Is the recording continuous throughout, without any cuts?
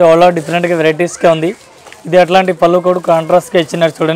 yes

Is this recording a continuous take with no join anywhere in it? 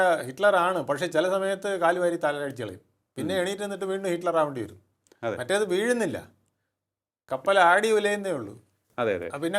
yes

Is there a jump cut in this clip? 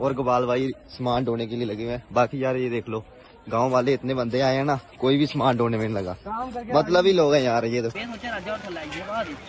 yes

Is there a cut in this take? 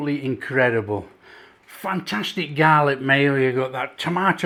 no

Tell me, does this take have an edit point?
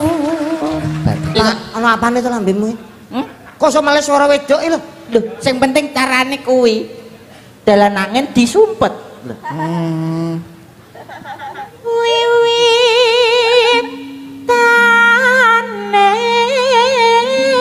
yes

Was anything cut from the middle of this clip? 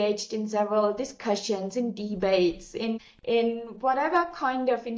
no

